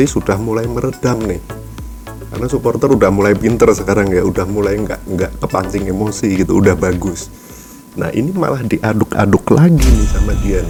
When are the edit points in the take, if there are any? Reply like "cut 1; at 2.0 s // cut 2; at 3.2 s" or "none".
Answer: none